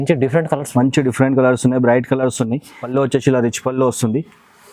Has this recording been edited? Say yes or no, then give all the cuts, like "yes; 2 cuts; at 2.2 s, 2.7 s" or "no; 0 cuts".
yes; 1 cut; at 2.7 s